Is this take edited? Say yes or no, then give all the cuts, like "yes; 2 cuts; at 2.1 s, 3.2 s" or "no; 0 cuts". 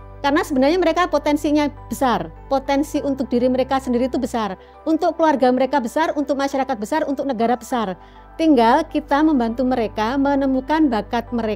no; 0 cuts